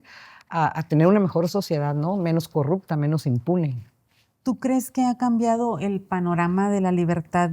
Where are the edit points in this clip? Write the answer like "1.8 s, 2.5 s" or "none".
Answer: none